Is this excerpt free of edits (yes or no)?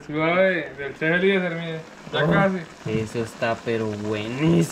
yes